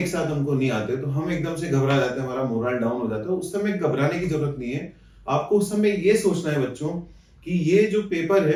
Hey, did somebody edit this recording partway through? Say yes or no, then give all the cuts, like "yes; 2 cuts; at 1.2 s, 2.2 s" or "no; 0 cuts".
no; 0 cuts